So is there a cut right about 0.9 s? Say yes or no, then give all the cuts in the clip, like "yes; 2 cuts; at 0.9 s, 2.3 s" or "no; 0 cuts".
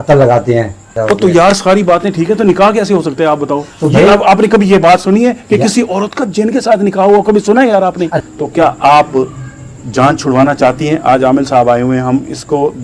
yes; 2 cuts; at 0.9 s, 8.2 s